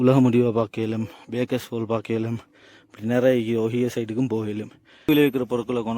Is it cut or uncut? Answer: cut